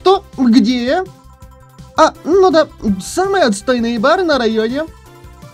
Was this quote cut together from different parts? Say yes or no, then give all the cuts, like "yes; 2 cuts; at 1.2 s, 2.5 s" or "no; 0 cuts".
no; 0 cuts